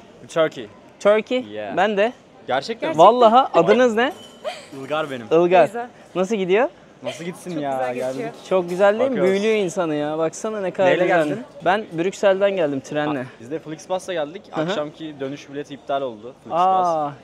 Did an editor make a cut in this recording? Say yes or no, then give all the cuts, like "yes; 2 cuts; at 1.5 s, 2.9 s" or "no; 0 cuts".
no; 0 cuts